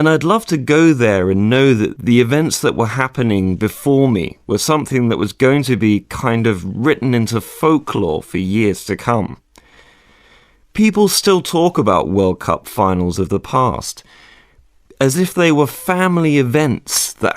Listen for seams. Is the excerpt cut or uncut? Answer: cut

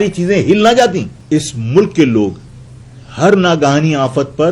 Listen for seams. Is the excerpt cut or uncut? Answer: cut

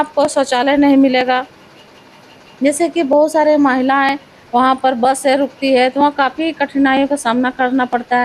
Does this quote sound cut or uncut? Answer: uncut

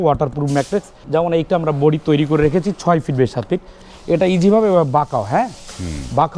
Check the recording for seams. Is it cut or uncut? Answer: cut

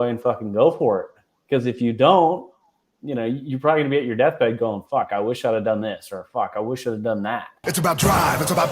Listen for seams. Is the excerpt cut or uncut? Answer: cut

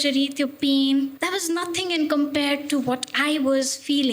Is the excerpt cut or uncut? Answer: cut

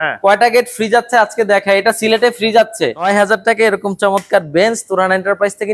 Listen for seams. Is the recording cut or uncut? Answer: cut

